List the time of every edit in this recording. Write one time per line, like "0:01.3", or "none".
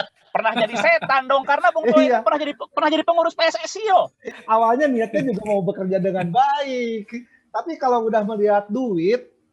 0:04.3